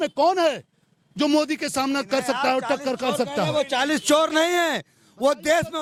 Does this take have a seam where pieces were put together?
no; 0 cuts

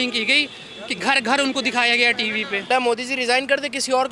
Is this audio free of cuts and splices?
no; 1 cut; at 2.7 s

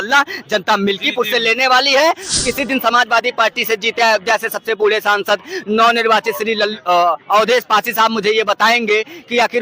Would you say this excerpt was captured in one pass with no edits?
no; 1 cut; at 2.3 s

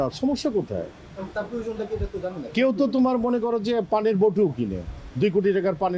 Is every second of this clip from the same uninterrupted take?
yes; 0 cuts

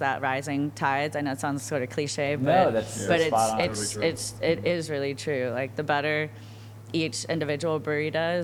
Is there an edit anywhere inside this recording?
no; 0 cuts

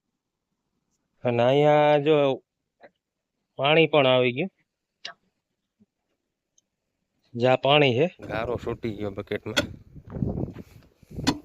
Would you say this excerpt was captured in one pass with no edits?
no; 1 cut; at 8.4 s

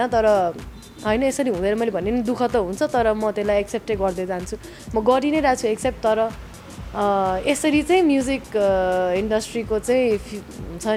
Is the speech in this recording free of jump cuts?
yes; 0 cuts

